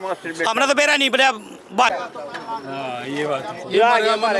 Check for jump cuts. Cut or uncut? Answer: cut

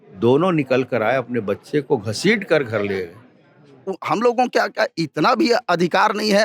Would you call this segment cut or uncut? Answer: cut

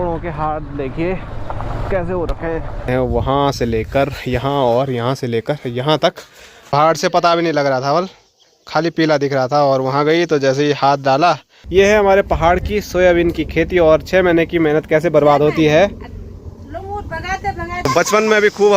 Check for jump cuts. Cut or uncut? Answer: cut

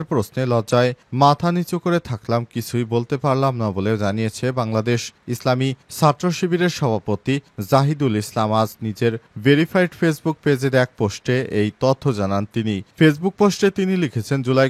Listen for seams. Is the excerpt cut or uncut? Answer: uncut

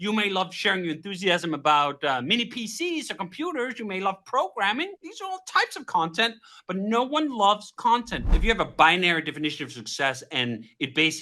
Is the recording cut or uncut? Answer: cut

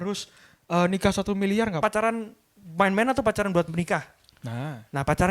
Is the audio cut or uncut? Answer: cut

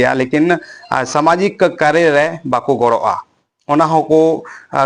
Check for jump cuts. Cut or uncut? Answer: uncut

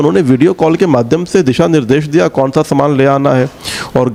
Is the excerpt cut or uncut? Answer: uncut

